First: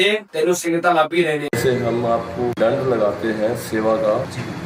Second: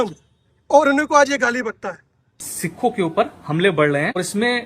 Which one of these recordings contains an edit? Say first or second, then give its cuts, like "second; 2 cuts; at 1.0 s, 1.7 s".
second; 1 cut; at 2.3 s